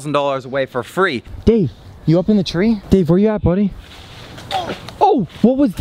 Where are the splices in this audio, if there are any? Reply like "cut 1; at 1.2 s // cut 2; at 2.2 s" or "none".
cut 1; at 1.3 s // cut 2; at 2.8 s